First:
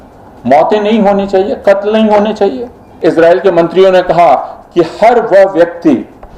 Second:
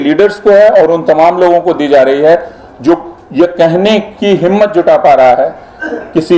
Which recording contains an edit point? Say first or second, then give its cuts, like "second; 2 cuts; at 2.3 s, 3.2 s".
first; 1 cut; at 3.0 s